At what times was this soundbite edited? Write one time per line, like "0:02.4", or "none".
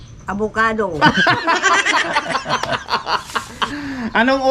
0:03.4